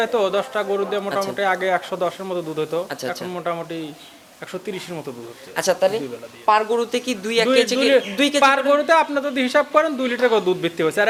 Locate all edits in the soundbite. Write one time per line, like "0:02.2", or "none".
none